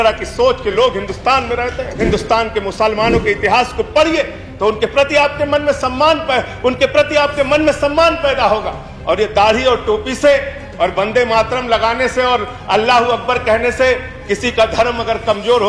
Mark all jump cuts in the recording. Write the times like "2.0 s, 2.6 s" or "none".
1.9 s

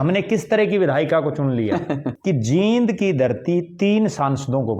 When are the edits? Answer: 2.1 s

